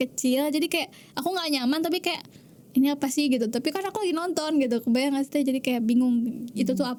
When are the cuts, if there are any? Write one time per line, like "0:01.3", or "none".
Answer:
none